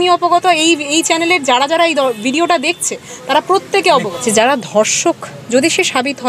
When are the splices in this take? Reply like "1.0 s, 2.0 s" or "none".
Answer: 4.1 s